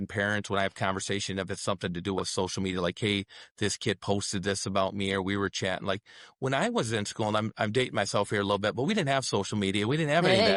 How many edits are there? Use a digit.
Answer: 0